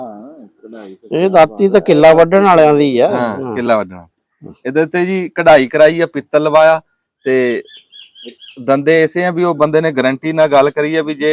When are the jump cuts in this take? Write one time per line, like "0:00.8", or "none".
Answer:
none